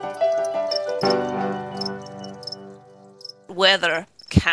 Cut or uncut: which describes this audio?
cut